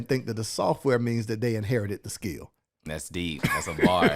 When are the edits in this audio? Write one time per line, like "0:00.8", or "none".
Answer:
0:02.9